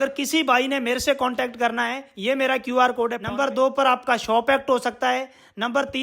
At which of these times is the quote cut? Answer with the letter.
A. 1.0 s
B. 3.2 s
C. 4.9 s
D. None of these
B